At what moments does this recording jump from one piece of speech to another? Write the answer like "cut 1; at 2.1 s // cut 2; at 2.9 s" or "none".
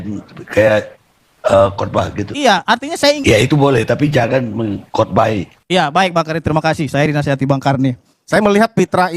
cut 1; at 3.2 s // cut 2; at 8.1 s